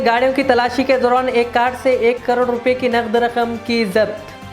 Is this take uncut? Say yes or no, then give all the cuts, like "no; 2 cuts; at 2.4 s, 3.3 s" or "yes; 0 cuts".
yes; 0 cuts